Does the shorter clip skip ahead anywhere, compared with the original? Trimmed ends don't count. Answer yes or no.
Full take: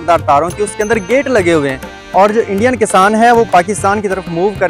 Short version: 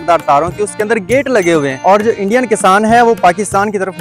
yes